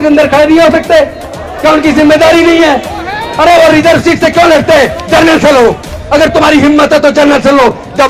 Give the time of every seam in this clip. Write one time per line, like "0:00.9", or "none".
none